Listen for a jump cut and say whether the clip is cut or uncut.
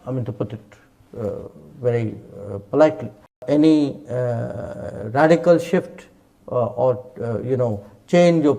cut